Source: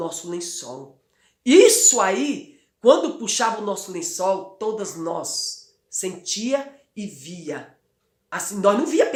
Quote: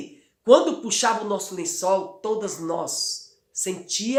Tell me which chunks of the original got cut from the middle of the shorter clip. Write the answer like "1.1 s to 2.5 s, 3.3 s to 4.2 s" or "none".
none